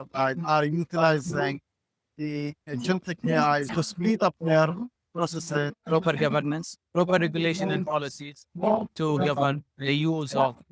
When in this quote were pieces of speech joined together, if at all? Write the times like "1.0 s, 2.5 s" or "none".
3.7 s, 5.8 s